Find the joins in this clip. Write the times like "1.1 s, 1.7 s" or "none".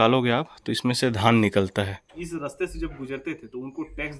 2.1 s

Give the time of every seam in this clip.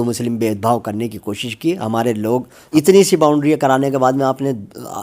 2.6 s

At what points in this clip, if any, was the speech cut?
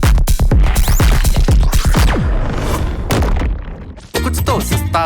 4.0 s

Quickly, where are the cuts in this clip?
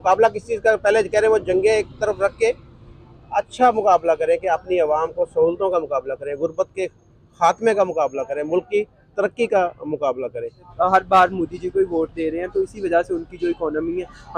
10.7 s

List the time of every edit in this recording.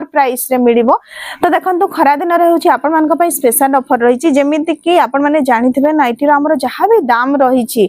1.2 s

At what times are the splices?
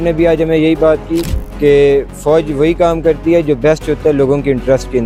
none

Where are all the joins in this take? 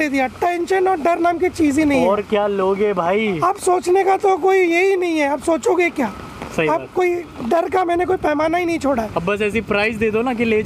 none

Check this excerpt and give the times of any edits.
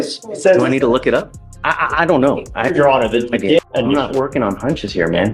3.6 s

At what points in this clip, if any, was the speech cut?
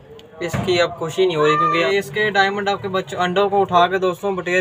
1.8 s

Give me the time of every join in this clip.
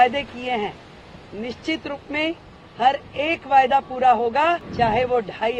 4.7 s

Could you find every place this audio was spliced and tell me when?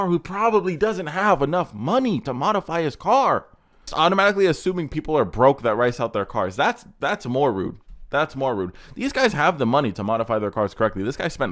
3.8 s

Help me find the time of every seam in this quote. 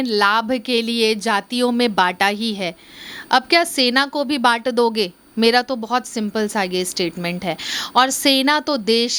none

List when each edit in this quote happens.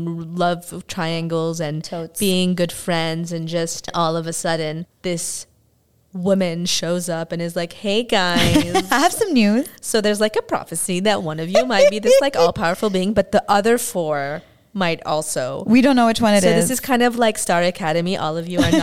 none

